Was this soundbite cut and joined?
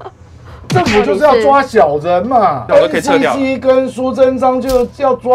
yes; 1 cut; at 2.6 s

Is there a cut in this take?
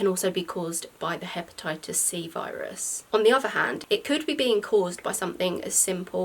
no; 0 cuts

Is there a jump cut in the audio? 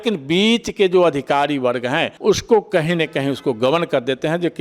yes; 1 cut; at 2.1 s

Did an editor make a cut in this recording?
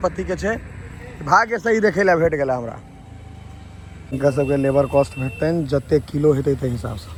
no; 0 cuts

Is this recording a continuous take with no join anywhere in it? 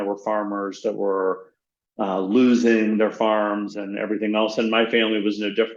yes; 0 cuts

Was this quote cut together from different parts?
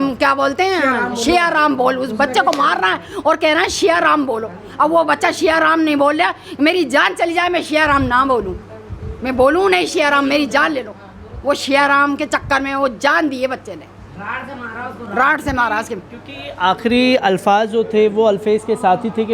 no; 0 cuts

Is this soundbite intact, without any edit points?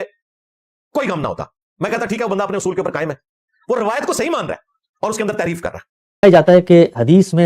no; 1 cut; at 6.2 s

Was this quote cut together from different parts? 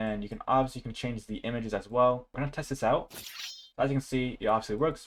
yes; 1 cut; at 2.4 s

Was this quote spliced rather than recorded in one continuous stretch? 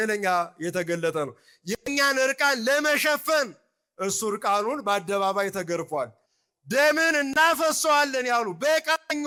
no; 0 cuts

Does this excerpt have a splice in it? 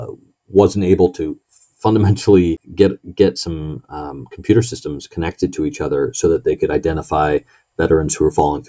yes; 1 cut; at 2.6 s

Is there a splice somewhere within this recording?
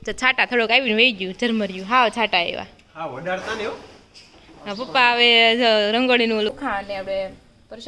yes; 1 cut; at 6.5 s

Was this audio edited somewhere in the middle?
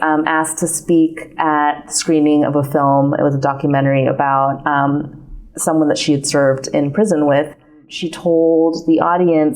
yes; 1 cut; at 8.0 s

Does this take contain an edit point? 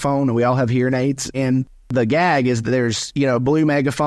yes; 1 cut; at 1.3 s

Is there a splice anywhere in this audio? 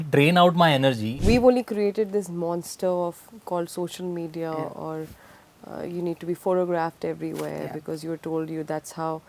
yes; 1 cut; at 1.1 s

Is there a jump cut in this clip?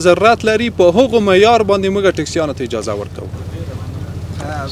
no; 0 cuts

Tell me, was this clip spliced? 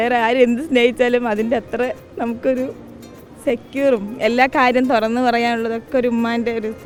no; 0 cuts

